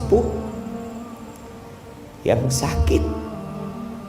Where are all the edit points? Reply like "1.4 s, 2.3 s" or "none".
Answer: 3.2 s